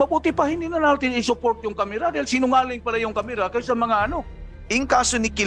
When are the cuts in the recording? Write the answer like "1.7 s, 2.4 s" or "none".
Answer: 4.4 s